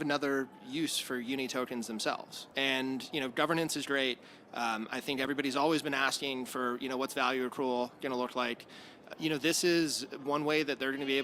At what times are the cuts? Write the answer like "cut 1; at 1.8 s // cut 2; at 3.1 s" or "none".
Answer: cut 1; at 2.4 s